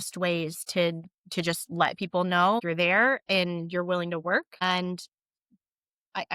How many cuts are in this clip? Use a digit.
2